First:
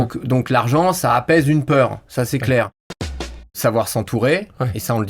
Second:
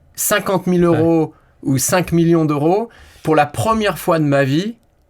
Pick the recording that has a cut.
first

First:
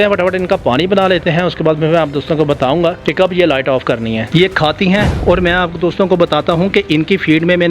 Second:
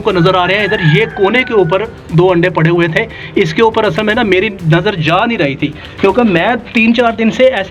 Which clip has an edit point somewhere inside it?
first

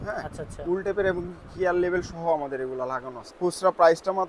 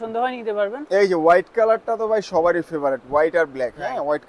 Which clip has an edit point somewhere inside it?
first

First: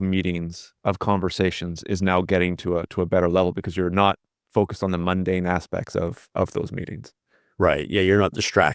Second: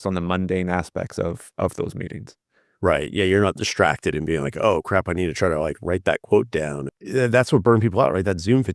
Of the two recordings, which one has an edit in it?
second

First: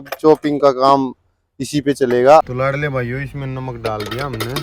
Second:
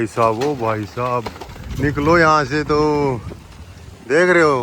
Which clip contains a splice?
first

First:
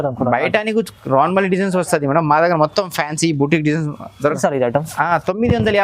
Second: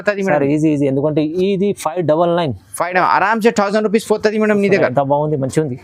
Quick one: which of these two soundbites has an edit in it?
first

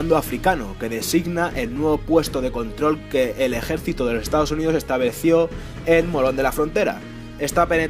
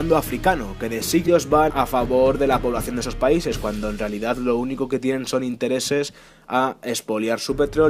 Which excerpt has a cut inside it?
first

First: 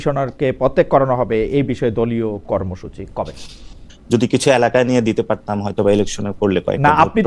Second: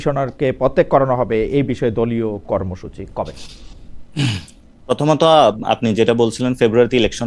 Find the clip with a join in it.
first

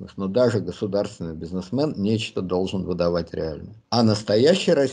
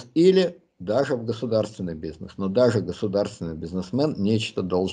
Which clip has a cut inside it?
first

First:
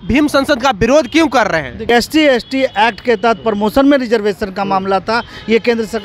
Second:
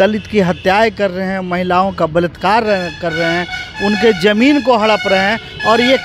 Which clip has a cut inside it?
first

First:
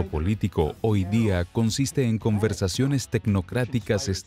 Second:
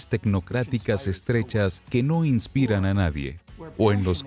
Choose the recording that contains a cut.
first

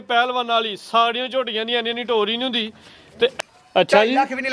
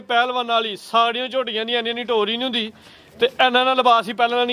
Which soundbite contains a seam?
first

